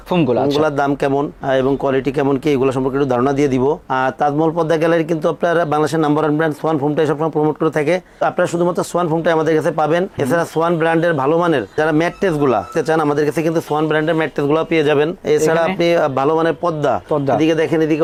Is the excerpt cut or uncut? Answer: uncut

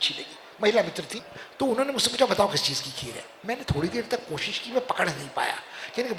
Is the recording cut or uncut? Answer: uncut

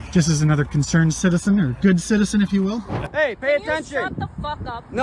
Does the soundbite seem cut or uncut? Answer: cut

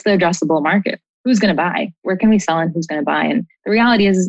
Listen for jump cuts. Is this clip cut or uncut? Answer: cut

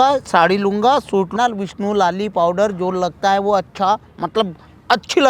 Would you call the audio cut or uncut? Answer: cut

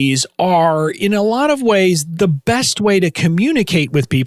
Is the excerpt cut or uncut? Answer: cut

